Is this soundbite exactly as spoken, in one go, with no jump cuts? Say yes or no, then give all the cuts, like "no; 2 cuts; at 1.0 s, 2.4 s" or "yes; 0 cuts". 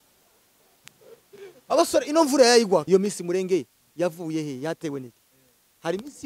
no; 1 cut; at 2.8 s